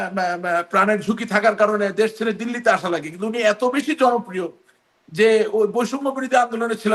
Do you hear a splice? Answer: no; 0 cuts

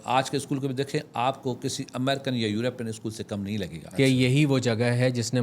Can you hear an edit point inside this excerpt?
yes; 1 cut; at 3.8 s

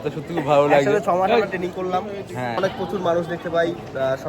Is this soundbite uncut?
no; 1 cut; at 2.6 s

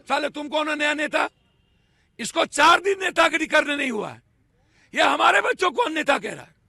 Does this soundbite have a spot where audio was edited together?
no; 0 cuts

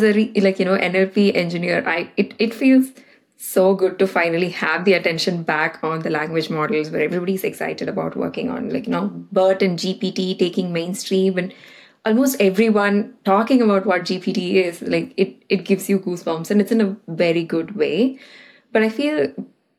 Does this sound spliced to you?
no; 0 cuts

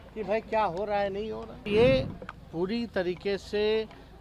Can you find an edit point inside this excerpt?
yes; 1 cut; at 1.7 s

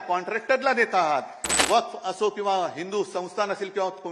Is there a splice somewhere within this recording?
yes; 1 cut; at 1.6 s

